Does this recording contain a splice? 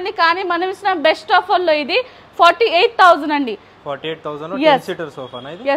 no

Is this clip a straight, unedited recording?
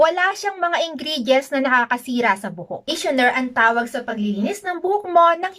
no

